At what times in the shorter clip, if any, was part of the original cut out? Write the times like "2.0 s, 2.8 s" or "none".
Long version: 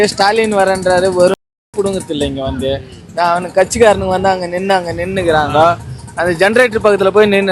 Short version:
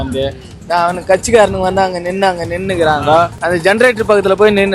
3.4 s